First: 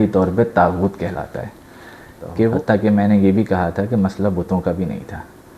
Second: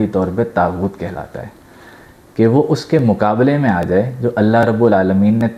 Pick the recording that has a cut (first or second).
first